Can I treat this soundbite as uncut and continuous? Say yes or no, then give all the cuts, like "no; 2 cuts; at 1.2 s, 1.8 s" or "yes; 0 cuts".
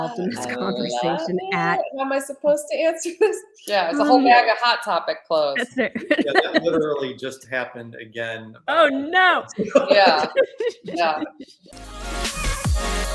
no; 1 cut; at 11.5 s